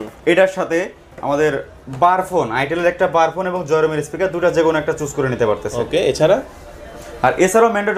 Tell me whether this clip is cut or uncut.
uncut